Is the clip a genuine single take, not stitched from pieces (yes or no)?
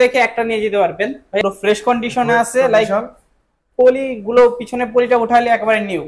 no